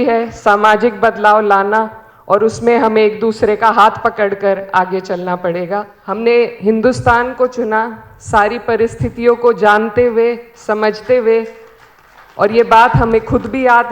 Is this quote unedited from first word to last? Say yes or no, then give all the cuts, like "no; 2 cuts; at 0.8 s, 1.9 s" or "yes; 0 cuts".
no; 1 cut; at 6.0 s